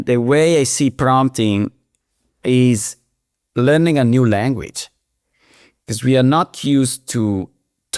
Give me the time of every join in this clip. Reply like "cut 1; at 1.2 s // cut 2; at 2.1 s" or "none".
none